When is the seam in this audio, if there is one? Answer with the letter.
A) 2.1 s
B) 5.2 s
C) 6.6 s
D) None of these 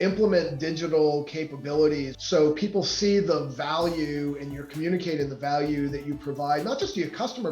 A